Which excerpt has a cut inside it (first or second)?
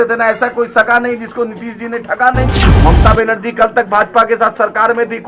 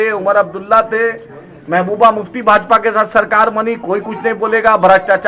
first